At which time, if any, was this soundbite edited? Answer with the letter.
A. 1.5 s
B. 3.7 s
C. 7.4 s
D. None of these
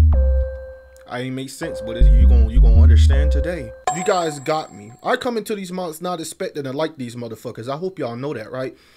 B